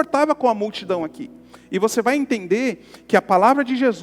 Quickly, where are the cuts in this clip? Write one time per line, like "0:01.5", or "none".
none